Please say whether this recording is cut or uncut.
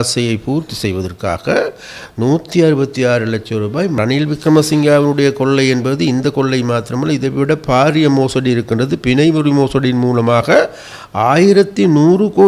cut